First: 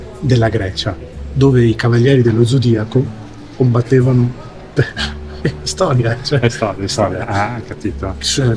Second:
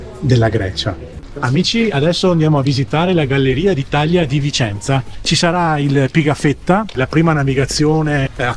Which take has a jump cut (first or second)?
second